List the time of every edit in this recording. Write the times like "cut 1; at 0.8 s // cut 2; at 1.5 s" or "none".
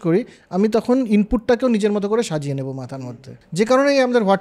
cut 1; at 2.9 s